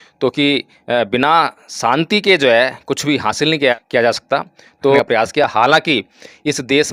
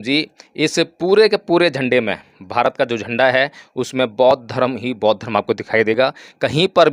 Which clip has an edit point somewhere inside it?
first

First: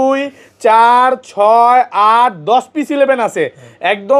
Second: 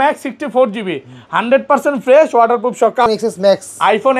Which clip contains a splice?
second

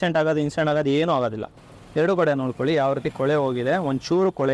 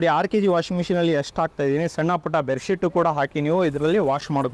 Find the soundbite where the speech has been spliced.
first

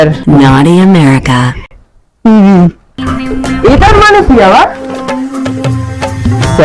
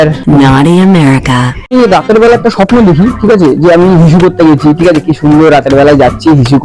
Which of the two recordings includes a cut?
second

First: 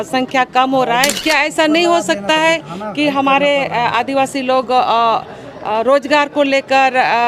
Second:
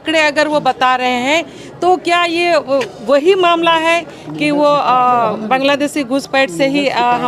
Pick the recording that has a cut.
first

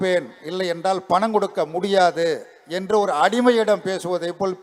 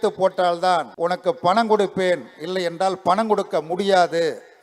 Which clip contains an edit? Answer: second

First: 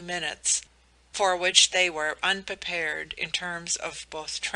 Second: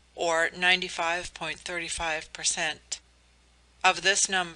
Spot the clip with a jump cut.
first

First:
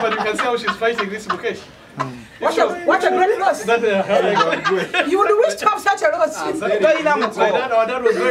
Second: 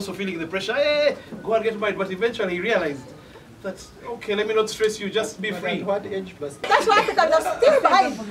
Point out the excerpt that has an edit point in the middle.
second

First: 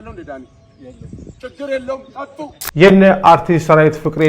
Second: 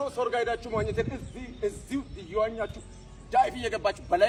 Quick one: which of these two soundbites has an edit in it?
first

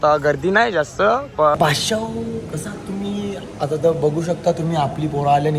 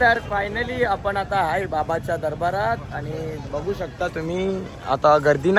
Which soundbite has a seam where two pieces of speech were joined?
first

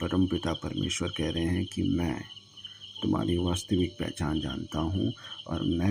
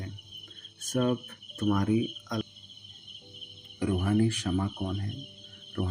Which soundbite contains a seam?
second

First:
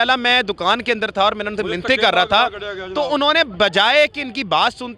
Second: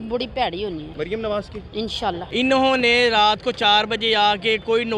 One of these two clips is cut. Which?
second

